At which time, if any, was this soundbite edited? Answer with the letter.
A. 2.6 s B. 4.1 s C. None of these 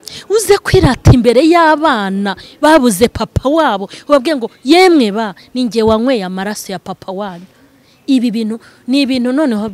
C